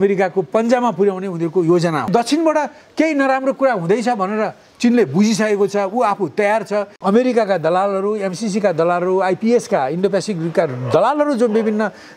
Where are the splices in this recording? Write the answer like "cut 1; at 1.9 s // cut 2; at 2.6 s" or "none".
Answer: cut 1; at 2.1 s // cut 2; at 6.9 s